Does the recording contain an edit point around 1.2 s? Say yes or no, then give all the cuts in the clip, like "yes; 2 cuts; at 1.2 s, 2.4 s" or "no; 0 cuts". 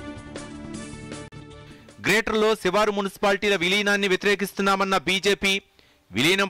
yes; 1 cut; at 1.2 s